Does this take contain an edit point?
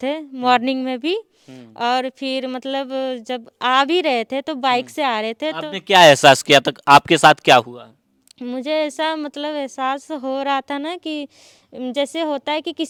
no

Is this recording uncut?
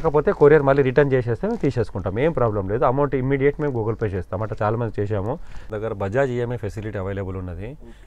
no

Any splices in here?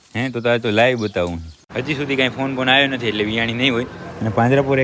yes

